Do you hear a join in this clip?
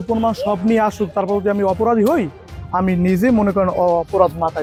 no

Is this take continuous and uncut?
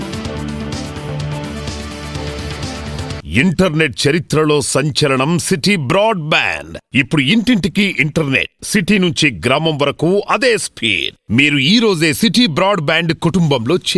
no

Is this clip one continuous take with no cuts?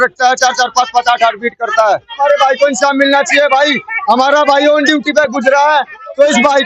yes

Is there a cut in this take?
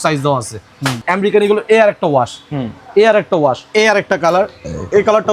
yes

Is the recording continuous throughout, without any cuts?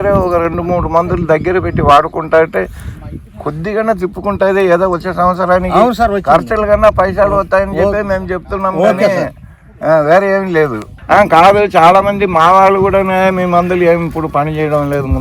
no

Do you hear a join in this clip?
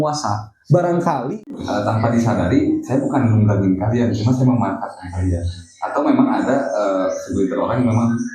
yes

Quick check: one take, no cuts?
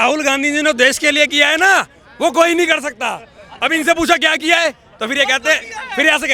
yes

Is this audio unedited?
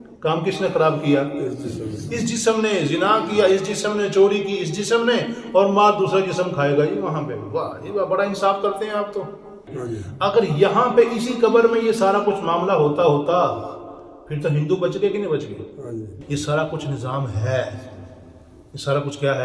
no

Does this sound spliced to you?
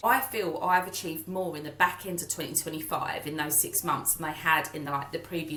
no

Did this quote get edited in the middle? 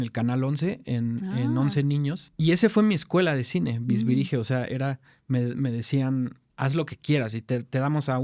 yes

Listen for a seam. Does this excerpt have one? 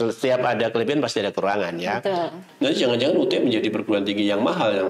yes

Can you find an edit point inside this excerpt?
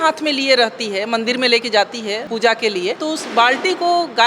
yes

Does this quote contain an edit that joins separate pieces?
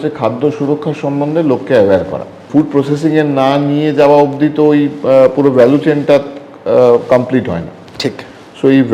yes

